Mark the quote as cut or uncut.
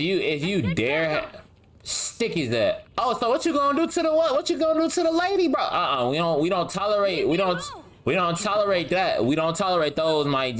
uncut